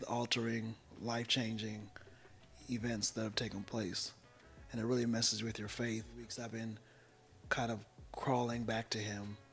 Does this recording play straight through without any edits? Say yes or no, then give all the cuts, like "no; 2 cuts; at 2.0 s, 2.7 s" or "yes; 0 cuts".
no; 1 cut; at 6.4 s